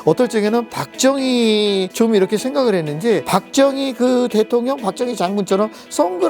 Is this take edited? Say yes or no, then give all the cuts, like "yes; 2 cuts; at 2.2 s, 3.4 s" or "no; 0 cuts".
yes; 2 cuts; at 1.9 s, 3.2 s